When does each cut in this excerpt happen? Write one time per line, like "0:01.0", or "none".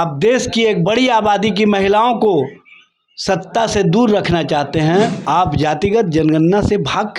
0:05.2

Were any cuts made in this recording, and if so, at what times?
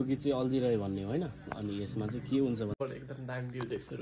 0:02.7

